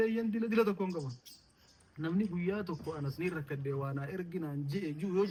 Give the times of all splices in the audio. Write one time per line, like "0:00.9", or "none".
none